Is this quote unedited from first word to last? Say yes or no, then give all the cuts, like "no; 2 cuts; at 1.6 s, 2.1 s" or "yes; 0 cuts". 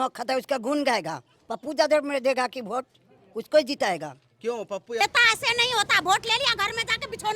no; 1 cut; at 5.0 s